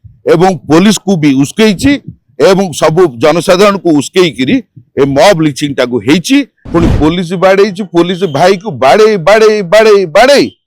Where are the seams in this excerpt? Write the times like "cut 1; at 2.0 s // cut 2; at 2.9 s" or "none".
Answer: cut 1; at 6.6 s

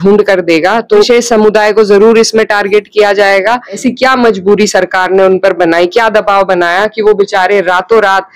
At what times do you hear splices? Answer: cut 1; at 1.1 s // cut 2; at 3.8 s

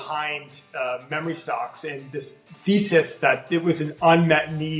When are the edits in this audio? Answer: cut 1; at 2.4 s

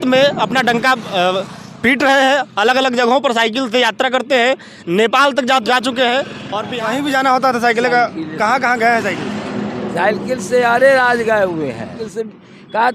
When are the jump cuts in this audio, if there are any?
cut 1; at 5.6 s // cut 2; at 6.6 s // cut 3; at 12.0 s

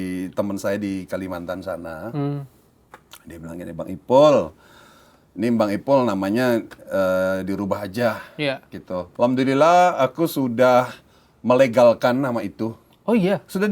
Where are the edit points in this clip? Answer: cut 1; at 9.1 s

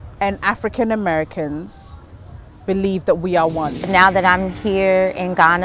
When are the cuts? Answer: cut 1; at 3.9 s

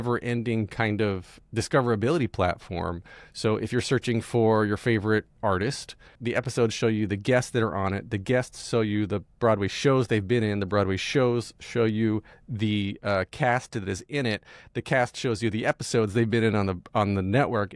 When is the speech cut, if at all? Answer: cut 1; at 1.4 s // cut 2; at 6.1 s

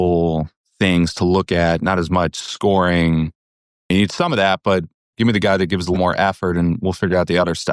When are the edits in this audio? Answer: cut 1; at 3.9 s // cut 2; at 5.1 s // cut 3; at 6.0 s

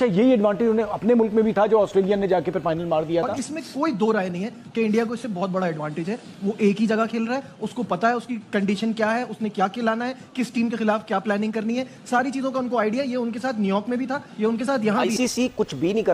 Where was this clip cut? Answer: cut 1; at 3.3 s // cut 2; at 15.1 s

